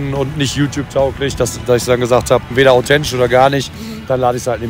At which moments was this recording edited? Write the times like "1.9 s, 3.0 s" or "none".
2.5 s